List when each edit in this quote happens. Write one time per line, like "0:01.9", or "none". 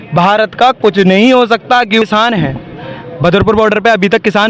0:02.0